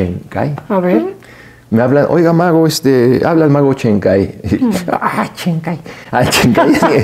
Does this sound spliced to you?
no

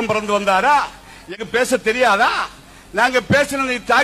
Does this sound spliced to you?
yes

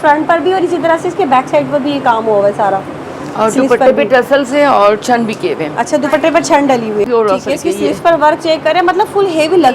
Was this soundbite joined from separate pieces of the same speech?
yes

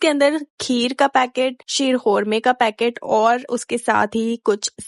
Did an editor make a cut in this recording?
no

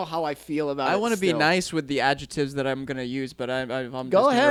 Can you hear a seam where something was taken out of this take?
no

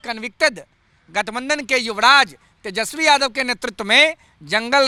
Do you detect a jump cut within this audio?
no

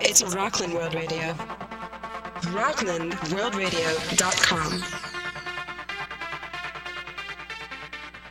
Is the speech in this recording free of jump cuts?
yes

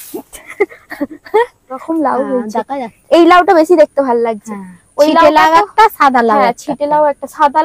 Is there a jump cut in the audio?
yes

